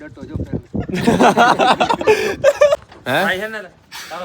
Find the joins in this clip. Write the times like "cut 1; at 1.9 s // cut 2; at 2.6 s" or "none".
cut 1; at 2.8 s